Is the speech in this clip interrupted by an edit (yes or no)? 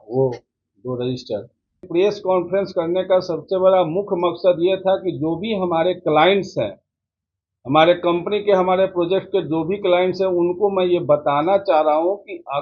yes